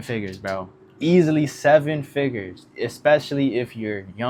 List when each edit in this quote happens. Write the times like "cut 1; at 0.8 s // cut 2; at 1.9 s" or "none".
none